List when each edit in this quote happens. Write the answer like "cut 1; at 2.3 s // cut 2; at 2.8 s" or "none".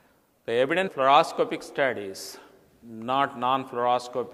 none